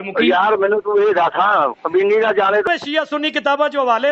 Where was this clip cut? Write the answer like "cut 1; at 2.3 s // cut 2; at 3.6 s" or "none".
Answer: cut 1; at 2.6 s

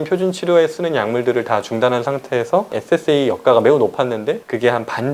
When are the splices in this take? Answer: cut 1; at 2.7 s

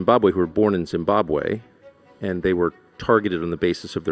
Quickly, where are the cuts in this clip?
none

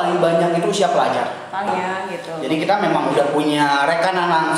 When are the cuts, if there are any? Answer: cut 1; at 1.7 s

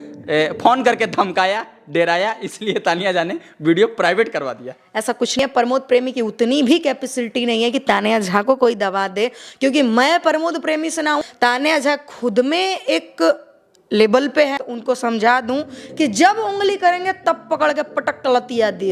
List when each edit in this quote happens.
cut 1; at 5.4 s // cut 2; at 11.2 s // cut 3; at 14.7 s // cut 4; at 15.8 s

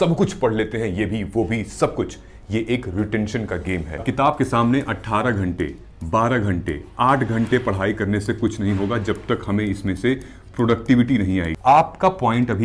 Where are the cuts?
cut 1; at 4.0 s // cut 2; at 11.5 s

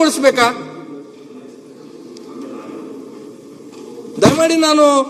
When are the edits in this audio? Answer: none

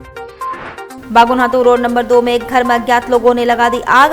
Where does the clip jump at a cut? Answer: cut 1; at 1.0 s

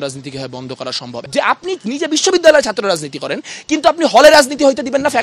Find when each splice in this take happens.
cut 1; at 1.1 s

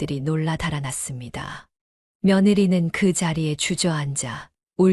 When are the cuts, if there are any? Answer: none

